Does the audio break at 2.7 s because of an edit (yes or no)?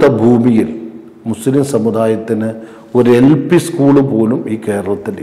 no